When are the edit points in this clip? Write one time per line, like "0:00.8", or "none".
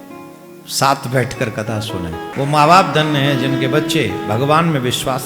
0:02.3